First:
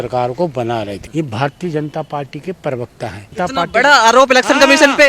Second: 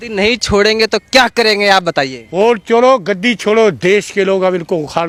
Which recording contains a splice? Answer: first; 2 cuts; at 1.0 s, 3.3 s

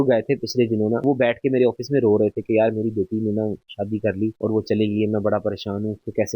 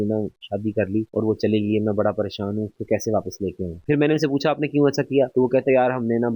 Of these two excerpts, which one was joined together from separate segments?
first; 1 cut; at 1.0 s

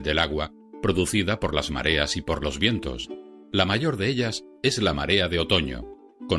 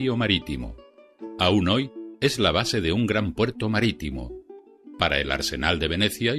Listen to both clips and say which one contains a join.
first; 1 cut; at 0.9 s

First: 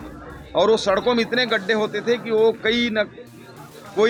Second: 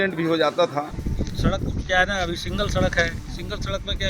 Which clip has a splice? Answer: second; 1 cut; at 1.0 s

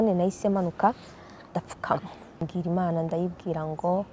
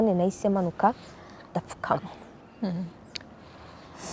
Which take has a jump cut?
first; 1 cut; at 2.5 s

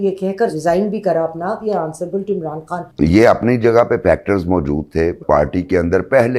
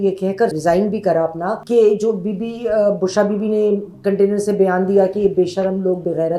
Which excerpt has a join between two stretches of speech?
first; 3 cuts; at 1.6 s, 2.9 s, 5.2 s

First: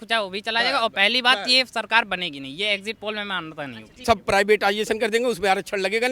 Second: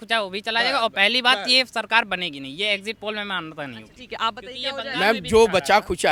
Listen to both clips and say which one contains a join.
first; 1 cut; at 3.9 s

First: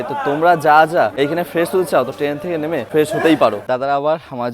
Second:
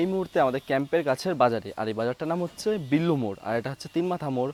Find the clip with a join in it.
first; 3 cuts; at 1.1 s, 2.8 s, 3.6 s

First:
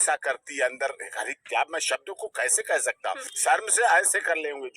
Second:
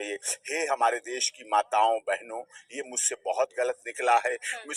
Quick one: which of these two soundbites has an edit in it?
first; 1 cut; at 3.3 s

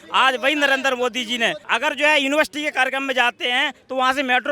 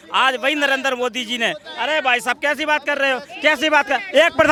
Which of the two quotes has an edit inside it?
first; 1 cut; at 1.6 s

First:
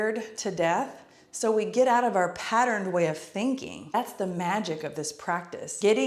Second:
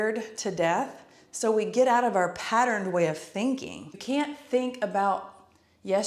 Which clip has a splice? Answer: second; 1 cut; at 3.9 s

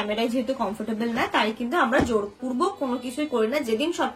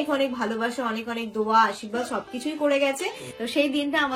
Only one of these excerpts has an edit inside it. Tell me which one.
second; 1 cut; at 3.3 s

